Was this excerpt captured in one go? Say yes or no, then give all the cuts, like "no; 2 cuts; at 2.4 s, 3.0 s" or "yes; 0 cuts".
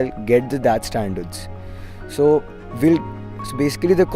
yes; 0 cuts